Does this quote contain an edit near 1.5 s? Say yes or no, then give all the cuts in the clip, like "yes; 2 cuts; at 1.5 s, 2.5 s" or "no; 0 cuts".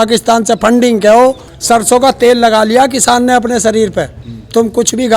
yes; 1 cut; at 1.5 s